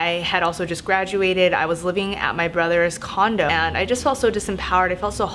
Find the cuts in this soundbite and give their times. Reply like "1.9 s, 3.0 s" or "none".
3.5 s